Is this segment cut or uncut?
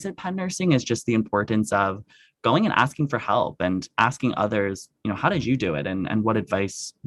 uncut